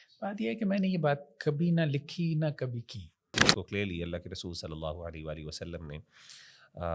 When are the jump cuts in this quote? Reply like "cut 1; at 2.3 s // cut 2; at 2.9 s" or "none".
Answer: cut 1; at 3.4 s

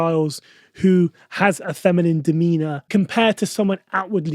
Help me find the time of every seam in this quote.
cut 1; at 2.8 s

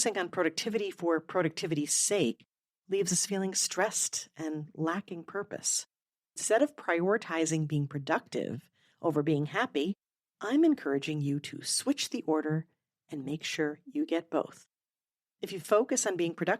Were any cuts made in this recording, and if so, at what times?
cut 1; at 6.4 s

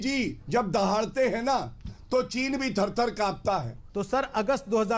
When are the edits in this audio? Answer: cut 1; at 3.8 s

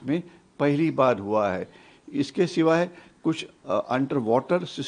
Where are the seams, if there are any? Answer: none

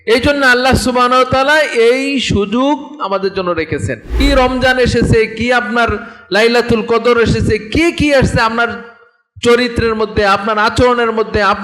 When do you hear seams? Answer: cut 1; at 4.1 s

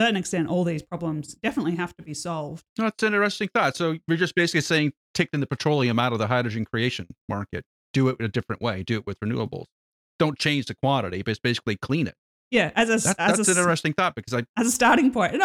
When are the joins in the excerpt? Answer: cut 1; at 2.6 s

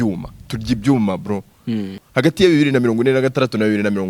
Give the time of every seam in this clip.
cut 1; at 1.9 s

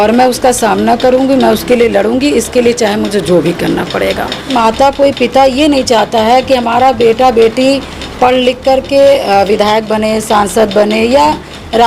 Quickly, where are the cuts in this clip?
cut 1; at 4.5 s

